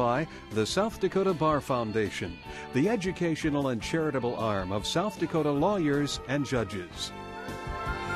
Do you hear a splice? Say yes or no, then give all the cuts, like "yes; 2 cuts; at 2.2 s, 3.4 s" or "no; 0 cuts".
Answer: yes; 1 cut; at 7.2 s